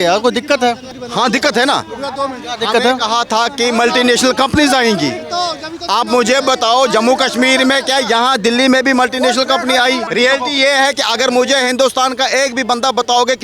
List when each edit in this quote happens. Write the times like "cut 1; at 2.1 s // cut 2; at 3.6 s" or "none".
cut 1; at 0.9 s // cut 2; at 10.0 s